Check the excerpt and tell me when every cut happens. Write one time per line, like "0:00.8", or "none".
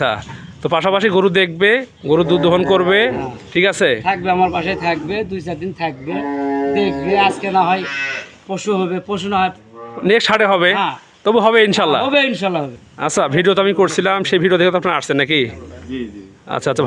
0:12.8